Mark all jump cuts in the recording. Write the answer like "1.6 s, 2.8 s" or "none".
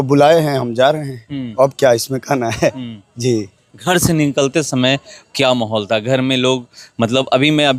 none